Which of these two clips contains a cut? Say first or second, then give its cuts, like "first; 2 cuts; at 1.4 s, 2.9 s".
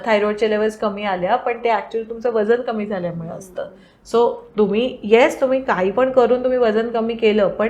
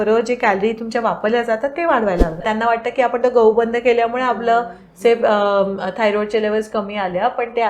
second; 1 cut; at 2.4 s